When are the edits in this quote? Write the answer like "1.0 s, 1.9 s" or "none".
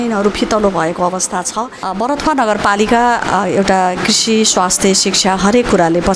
1.8 s